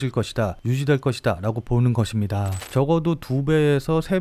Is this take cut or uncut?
cut